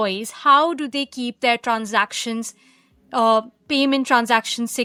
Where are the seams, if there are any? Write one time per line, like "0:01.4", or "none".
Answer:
none